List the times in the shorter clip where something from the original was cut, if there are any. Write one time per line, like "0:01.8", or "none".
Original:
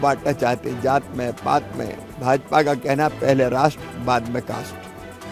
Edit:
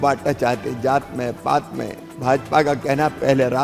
none

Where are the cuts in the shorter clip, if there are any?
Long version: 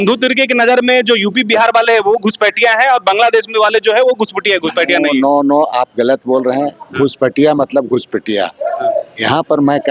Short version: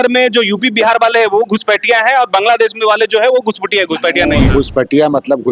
0:04.5

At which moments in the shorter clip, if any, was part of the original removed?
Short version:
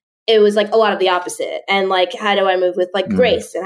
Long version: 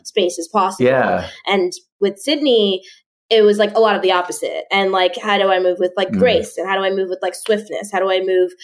none

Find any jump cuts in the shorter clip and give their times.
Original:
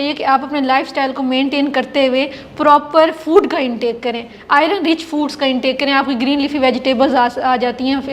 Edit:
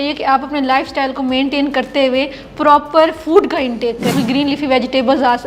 0:04.1

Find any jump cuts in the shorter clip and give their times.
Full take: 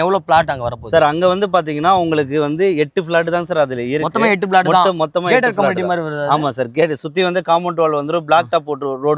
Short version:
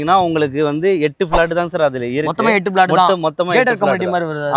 none

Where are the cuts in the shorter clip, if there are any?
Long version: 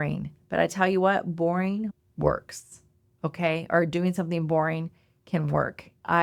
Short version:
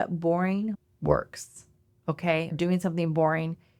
0:02.5

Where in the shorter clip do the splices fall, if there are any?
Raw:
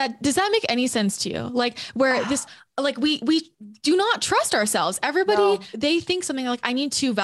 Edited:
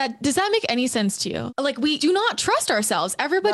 0:01.6

